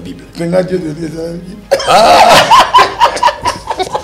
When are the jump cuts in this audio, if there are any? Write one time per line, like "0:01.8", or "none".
none

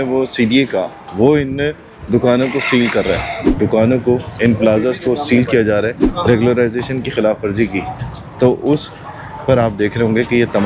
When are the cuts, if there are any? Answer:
0:03.4
0:06.0

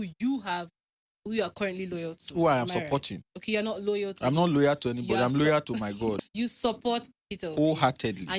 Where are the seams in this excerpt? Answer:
0:06.2

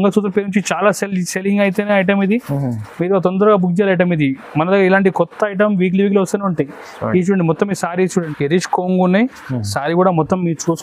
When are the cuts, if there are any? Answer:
0:08.3

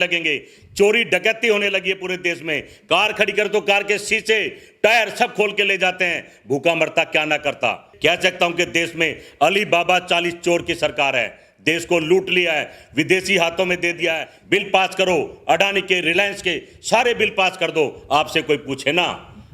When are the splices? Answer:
0:07.9
0:14.3

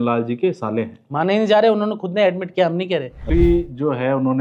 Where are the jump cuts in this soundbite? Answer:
0:03.2

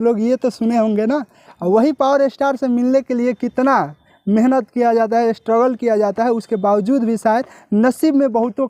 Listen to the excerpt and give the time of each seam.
none

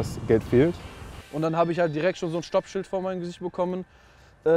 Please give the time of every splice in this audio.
0:01.2

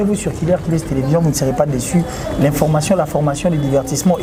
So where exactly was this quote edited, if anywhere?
none

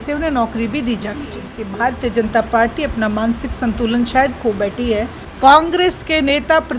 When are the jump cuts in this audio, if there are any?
0:01.6
0:05.2

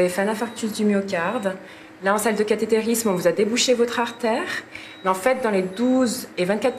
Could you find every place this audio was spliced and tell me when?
none

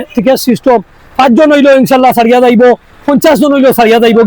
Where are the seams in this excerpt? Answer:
none

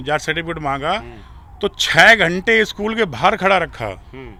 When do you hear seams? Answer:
none

